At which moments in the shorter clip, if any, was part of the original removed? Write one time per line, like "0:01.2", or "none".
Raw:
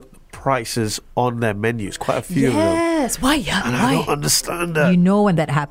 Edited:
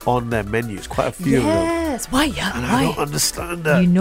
none